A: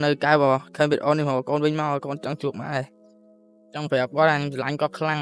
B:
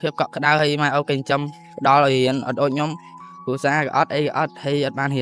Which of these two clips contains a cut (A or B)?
A